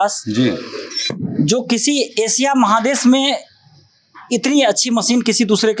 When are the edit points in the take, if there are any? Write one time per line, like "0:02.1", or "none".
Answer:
none